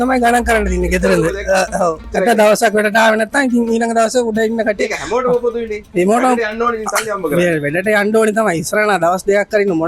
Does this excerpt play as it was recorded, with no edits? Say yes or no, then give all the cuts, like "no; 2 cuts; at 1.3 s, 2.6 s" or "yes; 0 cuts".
no; 1 cut; at 2.0 s